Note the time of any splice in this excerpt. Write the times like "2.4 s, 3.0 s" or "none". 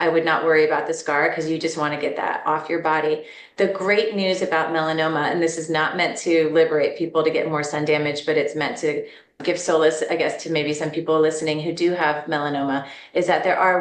none